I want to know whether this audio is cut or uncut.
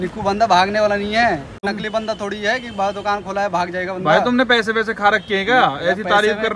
cut